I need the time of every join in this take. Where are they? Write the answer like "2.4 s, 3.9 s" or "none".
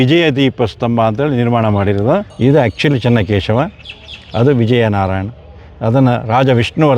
2.3 s